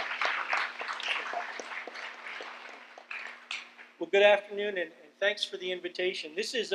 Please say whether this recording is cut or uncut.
uncut